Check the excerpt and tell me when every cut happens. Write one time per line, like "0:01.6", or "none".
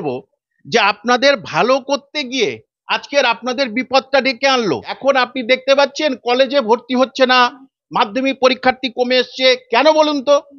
0:04.9